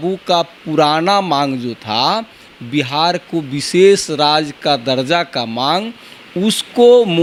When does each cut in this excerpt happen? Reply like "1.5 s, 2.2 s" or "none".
none